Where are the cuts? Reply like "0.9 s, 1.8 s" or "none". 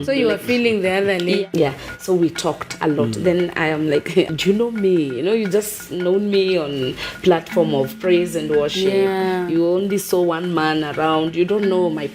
1.4 s, 4.3 s